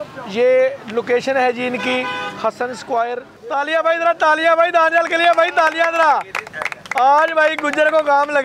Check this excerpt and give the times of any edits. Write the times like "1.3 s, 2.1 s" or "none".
3.3 s

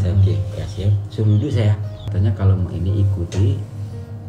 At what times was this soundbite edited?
1.9 s

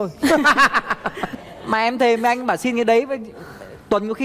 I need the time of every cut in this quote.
1.2 s

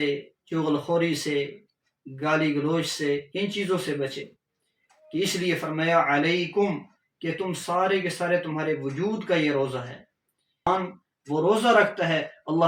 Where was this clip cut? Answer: 10.7 s

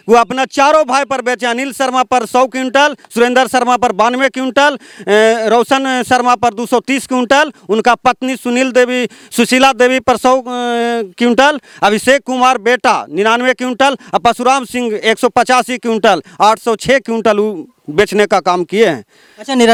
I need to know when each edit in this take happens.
none

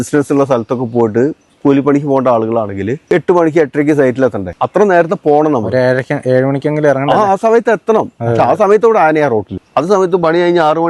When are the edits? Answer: 3.0 s, 4.5 s, 9.6 s

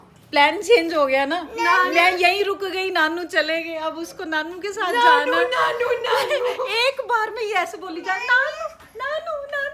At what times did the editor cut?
none

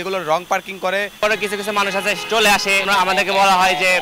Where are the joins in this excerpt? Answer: 1.2 s, 2.9 s

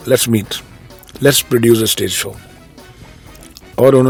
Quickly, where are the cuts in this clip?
none

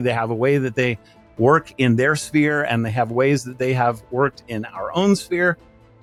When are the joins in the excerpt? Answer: none

